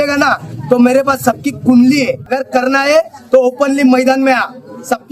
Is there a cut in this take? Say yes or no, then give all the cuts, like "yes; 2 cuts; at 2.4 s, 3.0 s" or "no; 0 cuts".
yes; 1 cut; at 2.3 s